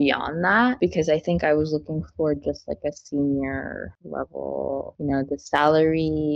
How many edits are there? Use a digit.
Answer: 2